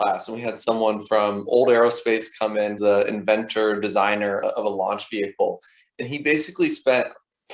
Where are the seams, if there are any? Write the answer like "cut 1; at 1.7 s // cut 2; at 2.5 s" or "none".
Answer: cut 1; at 2.8 s